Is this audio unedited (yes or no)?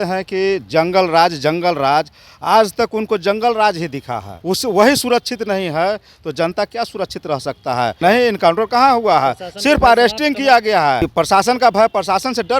no